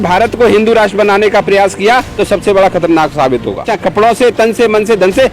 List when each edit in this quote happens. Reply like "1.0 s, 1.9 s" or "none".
3.7 s